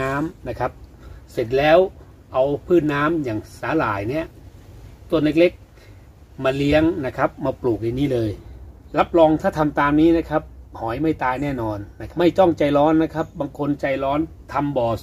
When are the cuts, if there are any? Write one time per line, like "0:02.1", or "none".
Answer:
0:08.5
0:11.9